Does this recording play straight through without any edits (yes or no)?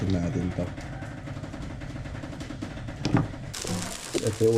no